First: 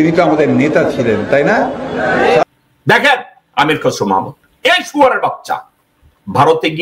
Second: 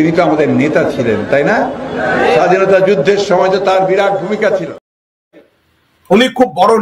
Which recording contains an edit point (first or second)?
first